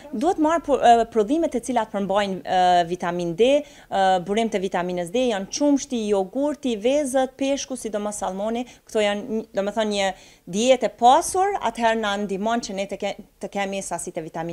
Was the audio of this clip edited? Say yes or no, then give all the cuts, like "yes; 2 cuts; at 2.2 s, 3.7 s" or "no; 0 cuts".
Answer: no; 0 cuts